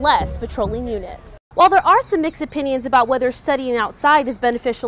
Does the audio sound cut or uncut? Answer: cut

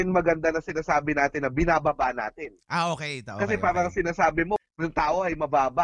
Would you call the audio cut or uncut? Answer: cut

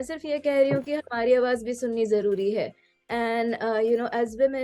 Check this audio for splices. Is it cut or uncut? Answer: uncut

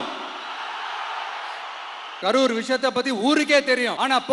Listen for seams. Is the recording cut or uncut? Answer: cut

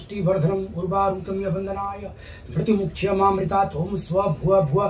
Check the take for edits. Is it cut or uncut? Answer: uncut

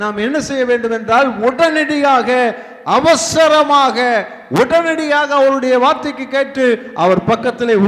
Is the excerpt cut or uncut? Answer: uncut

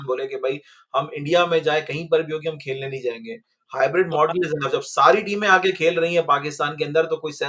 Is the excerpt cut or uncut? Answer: uncut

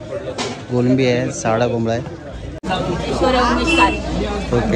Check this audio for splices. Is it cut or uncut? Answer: uncut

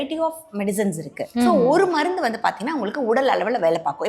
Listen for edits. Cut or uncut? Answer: cut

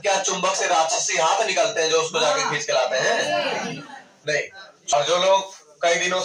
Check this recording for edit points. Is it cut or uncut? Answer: cut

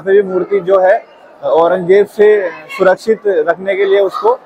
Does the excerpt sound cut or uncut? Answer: uncut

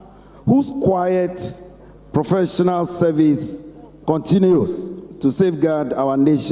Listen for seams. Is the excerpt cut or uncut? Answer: uncut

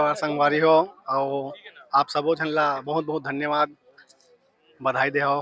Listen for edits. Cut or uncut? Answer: uncut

